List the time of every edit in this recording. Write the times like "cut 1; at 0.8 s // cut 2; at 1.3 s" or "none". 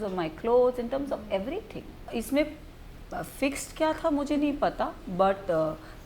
cut 1; at 2.0 s